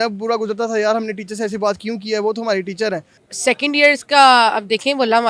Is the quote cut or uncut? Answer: cut